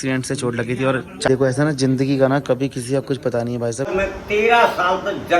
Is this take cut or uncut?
cut